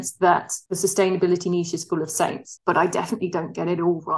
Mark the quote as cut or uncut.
cut